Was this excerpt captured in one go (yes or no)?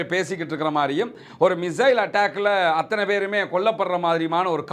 yes